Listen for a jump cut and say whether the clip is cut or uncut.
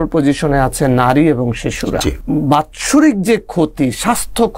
cut